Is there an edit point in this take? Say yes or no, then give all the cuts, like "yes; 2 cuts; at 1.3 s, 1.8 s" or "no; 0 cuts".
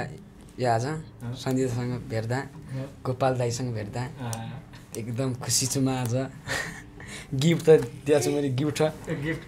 no; 0 cuts